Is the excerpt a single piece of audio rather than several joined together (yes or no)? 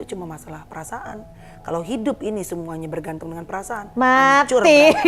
yes